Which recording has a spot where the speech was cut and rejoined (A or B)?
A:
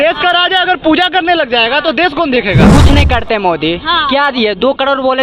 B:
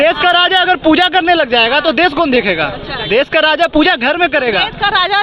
A